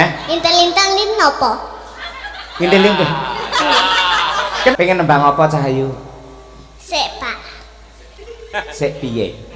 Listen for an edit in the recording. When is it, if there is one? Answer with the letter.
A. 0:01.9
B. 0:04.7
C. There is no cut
B